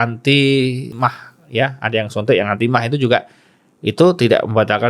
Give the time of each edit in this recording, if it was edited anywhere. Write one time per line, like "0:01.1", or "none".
0:01.0